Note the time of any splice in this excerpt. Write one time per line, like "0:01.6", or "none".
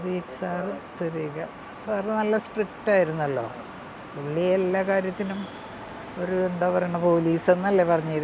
none